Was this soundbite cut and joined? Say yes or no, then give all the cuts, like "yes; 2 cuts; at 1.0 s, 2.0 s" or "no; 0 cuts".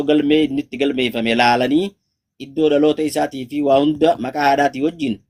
no; 0 cuts